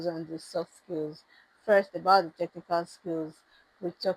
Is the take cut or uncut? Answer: uncut